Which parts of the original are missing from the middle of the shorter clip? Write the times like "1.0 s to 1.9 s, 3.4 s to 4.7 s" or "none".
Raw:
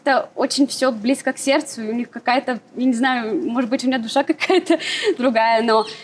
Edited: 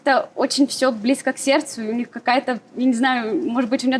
none